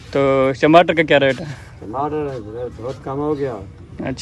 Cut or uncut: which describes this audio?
uncut